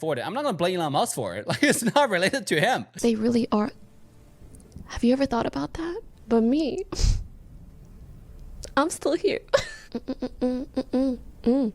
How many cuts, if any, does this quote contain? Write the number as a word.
one